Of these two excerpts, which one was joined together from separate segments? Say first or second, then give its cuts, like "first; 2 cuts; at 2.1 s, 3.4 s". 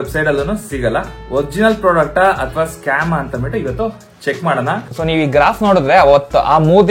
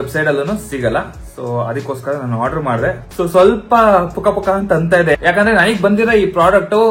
first; 2 cuts; at 1.2 s, 4.9 s